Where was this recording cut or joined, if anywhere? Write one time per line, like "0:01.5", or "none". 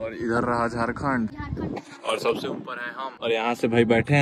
0:01.4
0:03.1